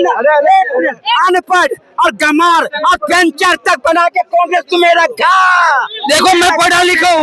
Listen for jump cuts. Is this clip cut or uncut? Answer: uncut